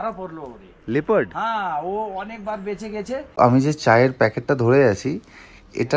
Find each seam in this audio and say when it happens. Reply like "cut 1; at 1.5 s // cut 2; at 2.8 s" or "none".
cut 1; at 3.3 s